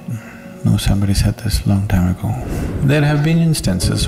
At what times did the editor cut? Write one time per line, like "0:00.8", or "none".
0:02.4